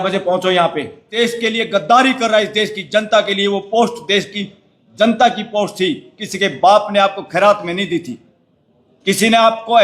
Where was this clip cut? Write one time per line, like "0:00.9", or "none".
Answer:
0:01.0